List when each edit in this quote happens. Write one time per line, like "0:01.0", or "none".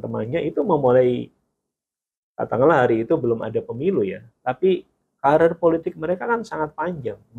none